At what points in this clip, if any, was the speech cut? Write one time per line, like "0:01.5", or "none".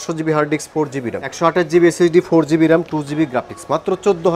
0:01.3